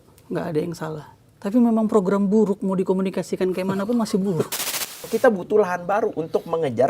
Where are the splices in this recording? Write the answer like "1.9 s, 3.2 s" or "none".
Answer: 4.5 s